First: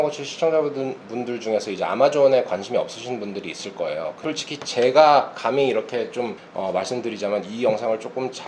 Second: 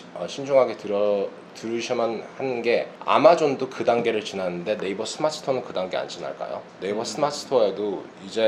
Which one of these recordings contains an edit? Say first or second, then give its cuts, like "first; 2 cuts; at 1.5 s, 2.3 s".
first; 2 cuts; at 4.2 s, 6.4 s